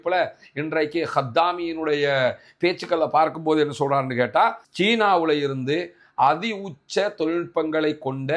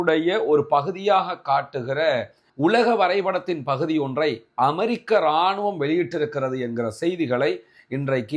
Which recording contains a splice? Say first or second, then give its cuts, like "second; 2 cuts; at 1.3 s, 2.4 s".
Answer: first; 1 cut; at 4.7 s